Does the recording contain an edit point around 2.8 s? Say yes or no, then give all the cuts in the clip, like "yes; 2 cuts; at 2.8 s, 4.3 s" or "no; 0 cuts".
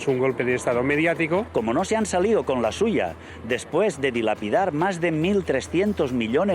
no; 1 cut; at 1.5 s